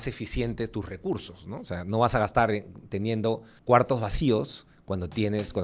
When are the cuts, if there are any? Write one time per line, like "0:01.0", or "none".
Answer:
0:03.5